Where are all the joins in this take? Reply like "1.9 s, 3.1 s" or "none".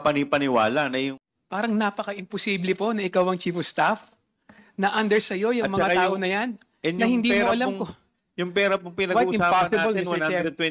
1.2 s

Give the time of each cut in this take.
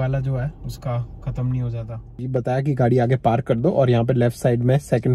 2.3 s

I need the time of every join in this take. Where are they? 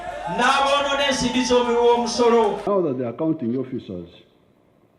2.6 s

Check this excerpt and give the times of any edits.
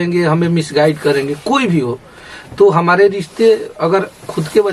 none

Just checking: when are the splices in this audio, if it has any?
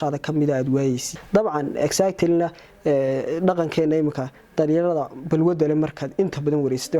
1.1 s

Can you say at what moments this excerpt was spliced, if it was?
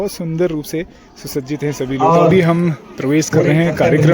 2.0 s

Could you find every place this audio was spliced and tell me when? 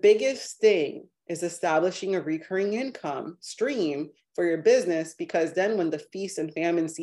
none

